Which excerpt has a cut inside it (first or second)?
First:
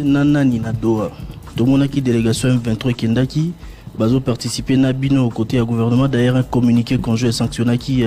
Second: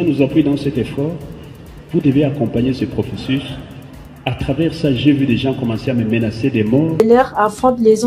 second